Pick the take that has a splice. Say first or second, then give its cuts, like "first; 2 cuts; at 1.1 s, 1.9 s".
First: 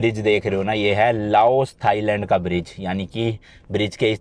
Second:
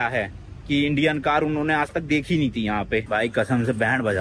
second; 1 cut; at 3.1 s